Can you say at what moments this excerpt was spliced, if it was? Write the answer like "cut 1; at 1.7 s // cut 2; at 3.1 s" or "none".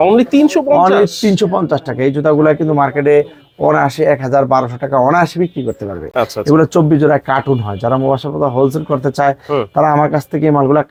none